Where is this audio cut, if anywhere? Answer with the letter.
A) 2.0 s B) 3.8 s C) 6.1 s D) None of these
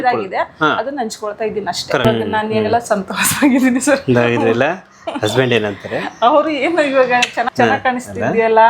A